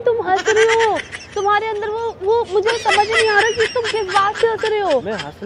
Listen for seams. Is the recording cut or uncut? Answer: uncut